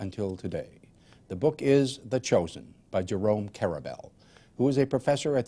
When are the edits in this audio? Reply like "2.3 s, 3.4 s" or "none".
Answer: 1.6 s